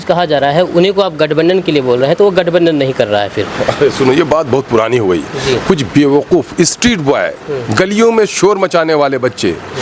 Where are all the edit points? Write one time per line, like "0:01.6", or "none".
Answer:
none